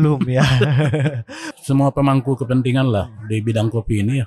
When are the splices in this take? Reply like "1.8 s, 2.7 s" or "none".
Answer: 1.5 s